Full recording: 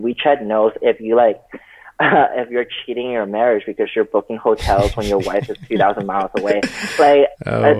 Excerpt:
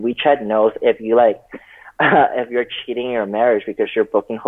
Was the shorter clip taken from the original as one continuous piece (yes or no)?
yes